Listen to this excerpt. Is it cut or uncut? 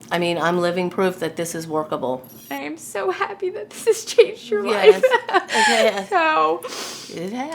cut